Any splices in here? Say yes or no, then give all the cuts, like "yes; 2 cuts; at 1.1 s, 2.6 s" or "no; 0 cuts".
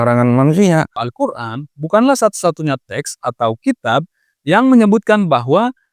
yes; 1 cut; at 1.0 s